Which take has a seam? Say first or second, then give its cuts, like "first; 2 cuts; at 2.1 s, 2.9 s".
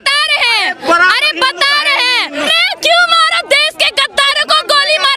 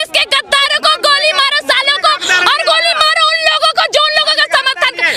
first; 1 cut; at 2.5 s